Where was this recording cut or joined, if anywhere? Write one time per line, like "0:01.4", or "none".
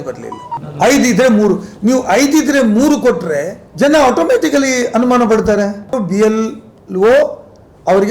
0:06.0